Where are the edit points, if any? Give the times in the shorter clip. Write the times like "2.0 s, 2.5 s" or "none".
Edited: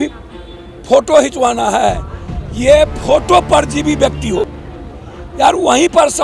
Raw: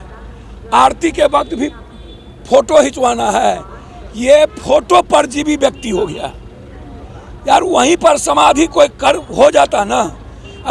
4.6 s

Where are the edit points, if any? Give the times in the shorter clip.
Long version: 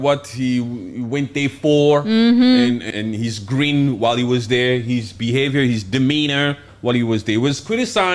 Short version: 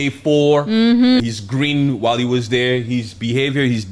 1.2 s

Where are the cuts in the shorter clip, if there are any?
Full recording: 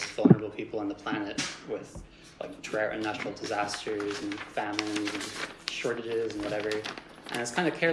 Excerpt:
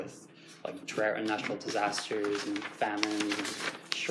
none

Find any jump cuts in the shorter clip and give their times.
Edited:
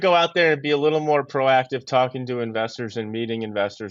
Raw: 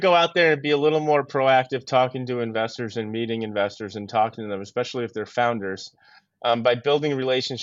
none

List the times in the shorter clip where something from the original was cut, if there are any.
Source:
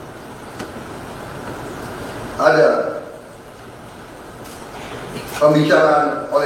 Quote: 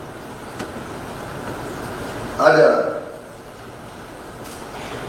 none

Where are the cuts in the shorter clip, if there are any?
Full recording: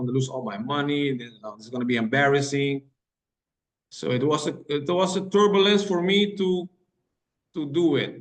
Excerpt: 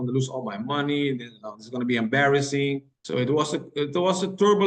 2.9 s

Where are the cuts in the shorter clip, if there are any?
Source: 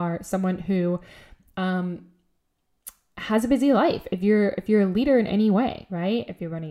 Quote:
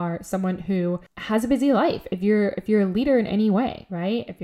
1.1 s

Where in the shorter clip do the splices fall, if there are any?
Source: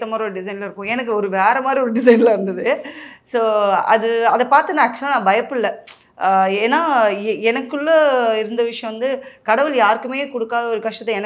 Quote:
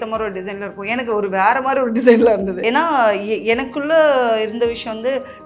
2.6 s

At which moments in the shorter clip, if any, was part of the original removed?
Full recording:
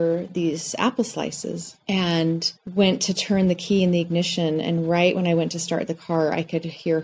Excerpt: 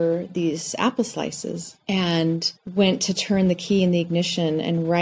none

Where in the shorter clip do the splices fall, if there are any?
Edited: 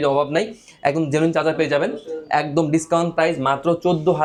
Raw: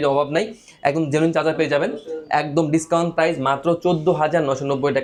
none

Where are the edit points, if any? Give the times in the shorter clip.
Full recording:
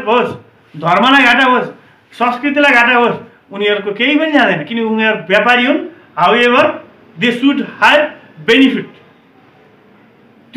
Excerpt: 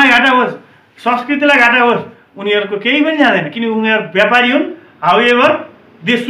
none

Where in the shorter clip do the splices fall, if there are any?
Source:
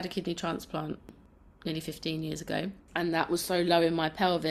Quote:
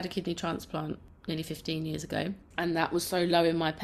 1.1 s

